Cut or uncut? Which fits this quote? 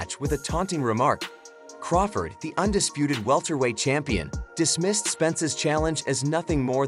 cut